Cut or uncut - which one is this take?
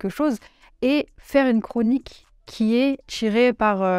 cut